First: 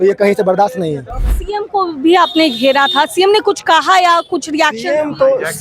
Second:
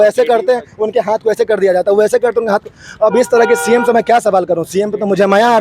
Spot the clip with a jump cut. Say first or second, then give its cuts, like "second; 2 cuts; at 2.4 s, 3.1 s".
first; 1 cut; at 1.3 s